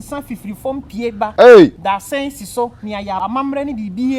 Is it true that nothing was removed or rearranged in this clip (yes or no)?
no